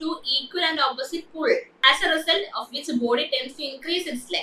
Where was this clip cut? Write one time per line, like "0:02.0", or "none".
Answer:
0:01.7